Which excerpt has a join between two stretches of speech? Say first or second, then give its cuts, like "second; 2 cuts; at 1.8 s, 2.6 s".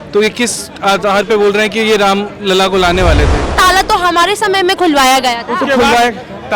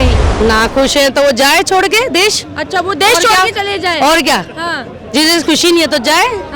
first; 1 cut; at 3.5 s